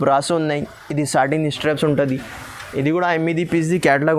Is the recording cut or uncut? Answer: uncut